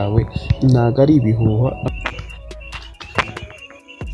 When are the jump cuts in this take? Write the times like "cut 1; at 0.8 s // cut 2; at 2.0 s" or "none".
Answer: cut 1; at 1.9 s

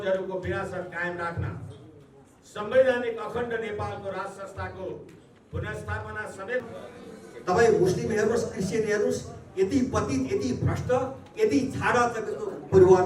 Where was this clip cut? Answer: cut 1; at 6.7 s

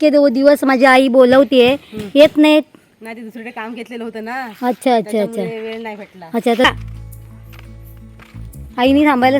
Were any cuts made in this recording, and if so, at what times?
cut 1; at 6.7 s

